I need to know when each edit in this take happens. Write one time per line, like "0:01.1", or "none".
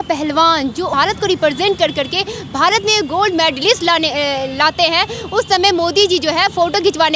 0:00.9